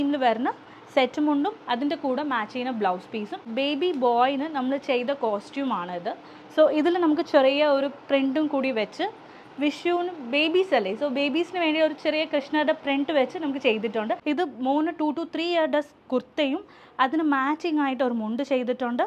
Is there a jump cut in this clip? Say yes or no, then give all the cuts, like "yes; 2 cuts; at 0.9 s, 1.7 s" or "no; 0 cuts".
yes; 2 cuts; at 3.4 s, 14.2 s